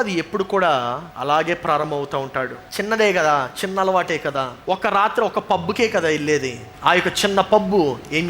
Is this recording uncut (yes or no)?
no